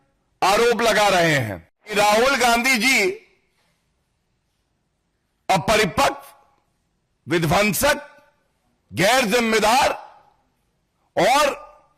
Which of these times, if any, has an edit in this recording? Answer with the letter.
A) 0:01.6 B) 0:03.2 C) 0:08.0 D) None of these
A